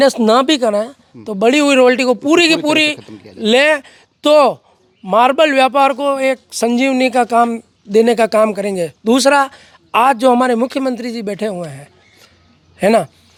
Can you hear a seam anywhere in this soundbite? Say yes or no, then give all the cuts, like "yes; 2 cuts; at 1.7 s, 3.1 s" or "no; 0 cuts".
no; 0 cuts